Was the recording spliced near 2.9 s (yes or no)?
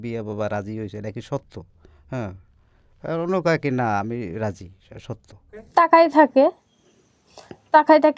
no